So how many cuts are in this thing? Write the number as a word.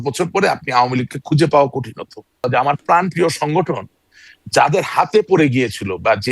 one